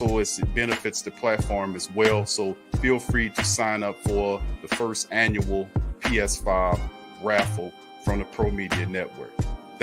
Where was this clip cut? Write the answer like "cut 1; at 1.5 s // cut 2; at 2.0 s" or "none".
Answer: none